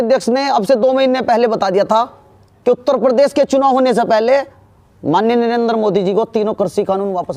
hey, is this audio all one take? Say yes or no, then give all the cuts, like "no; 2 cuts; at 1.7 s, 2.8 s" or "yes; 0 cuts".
yes; 0 cuts